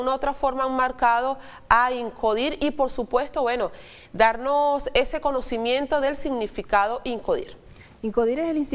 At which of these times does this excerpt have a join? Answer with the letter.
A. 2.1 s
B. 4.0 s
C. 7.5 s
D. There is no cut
A